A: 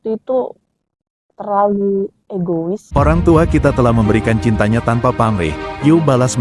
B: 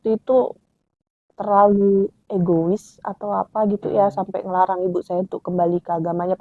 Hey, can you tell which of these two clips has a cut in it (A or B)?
A